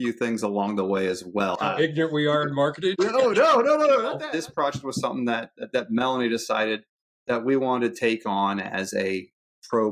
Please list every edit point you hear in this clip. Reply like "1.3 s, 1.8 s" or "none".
1.6 s, 2.9 s, 4.2 s